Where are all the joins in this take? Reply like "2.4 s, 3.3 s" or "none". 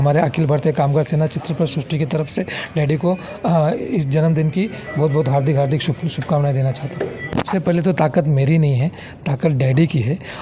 7.3 s